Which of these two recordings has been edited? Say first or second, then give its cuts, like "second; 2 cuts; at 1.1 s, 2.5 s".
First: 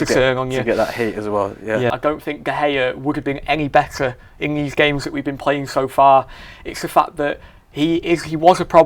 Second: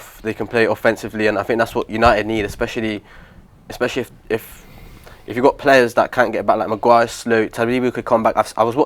first; 1 cut; at 1.9 s